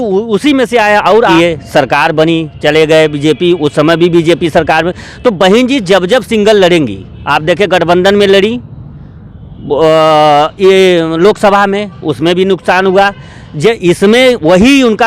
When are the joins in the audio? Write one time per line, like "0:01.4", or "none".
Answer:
0:01.3